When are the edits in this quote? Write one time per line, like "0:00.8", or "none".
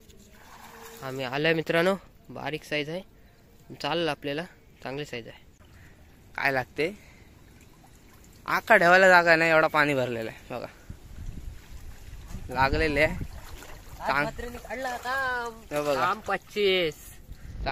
0:05.5